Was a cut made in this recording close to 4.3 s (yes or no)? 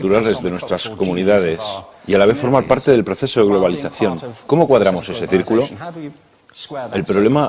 no